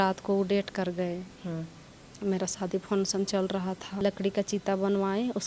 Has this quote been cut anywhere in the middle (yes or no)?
yes